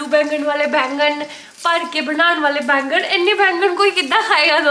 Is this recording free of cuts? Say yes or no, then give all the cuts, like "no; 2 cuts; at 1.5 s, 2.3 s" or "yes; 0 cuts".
yes; 0 cuts